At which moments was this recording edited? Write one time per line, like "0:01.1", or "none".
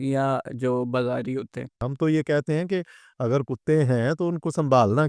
0:01.8